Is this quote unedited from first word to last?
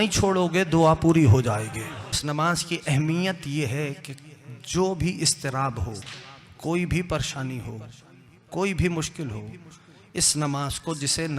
no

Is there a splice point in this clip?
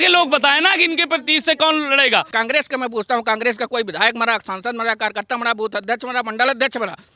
yes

